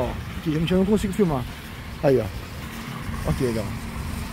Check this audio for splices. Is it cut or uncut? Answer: cut